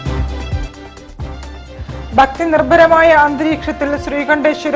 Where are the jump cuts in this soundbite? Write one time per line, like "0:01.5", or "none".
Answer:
0:01.4